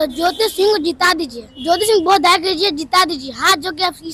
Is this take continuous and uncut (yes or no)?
no